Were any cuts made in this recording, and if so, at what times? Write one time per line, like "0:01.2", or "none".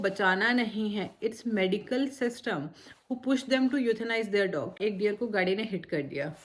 0:04.7